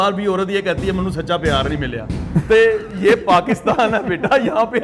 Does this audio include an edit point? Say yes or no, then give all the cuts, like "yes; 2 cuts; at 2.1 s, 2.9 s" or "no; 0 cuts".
no; 0 cuts